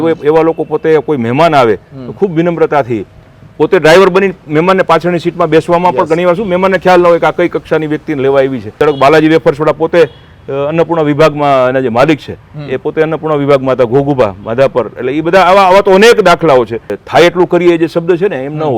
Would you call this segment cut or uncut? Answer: cut